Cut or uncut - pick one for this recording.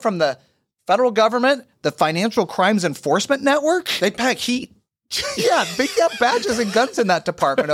uncut